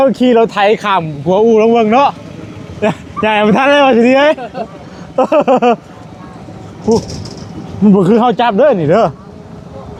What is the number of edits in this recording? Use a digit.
0